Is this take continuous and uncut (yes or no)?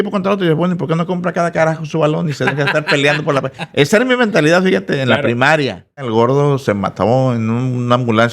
no